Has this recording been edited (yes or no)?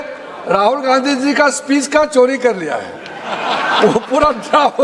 no